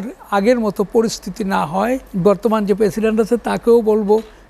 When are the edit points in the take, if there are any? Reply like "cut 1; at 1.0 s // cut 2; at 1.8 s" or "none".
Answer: cut 1; at 2.1 s